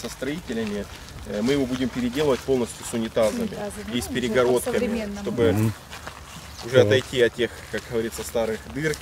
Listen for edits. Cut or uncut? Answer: uncut